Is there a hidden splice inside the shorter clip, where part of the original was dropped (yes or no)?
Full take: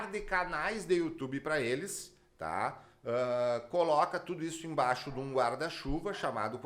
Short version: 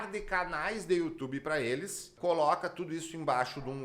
yes